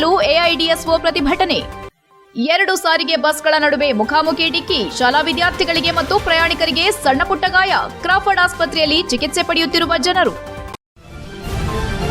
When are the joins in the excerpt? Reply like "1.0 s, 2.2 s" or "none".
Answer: 10.6 s